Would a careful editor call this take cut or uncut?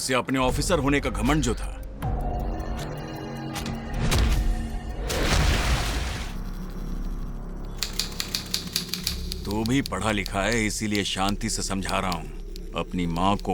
uncut